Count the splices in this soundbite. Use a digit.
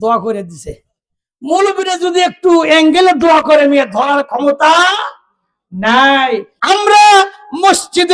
1